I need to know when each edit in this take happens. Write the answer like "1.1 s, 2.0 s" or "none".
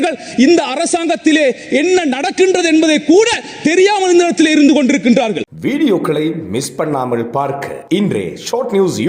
5.5 s

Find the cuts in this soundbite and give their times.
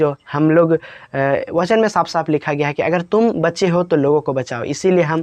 none

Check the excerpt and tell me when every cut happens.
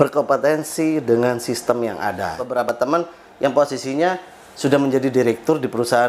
2.6 s

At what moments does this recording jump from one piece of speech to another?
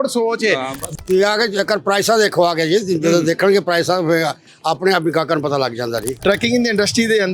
0.8 s, 6.1 s

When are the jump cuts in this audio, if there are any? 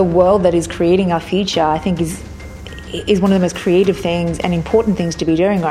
none

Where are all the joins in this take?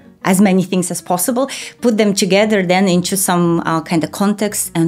none

